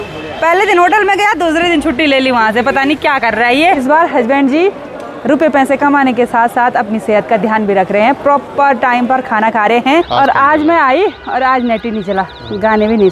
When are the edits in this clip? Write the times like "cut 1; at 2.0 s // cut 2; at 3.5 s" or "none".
cut 1; at 3.8 s // cut 2; at 10.1 s